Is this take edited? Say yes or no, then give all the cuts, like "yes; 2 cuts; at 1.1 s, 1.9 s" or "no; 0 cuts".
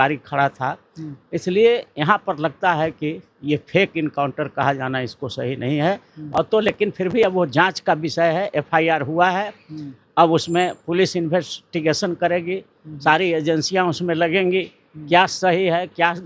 no; 0 cuts